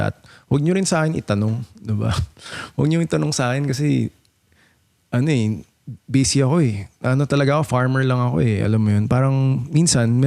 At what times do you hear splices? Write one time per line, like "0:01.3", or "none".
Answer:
none